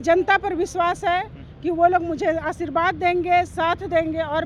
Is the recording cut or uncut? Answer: uncut